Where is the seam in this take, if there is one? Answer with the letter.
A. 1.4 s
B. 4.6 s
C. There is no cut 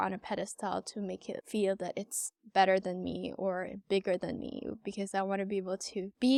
C